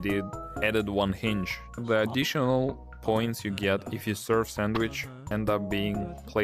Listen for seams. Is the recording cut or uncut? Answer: cut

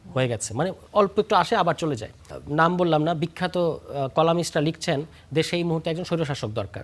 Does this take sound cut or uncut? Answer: cut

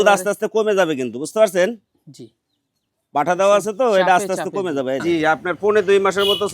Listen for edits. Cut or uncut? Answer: cut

